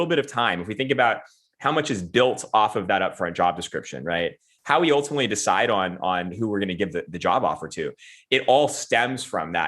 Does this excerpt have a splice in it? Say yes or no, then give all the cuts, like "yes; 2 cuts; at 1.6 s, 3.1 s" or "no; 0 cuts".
yes; 1 cut; at 4.5 s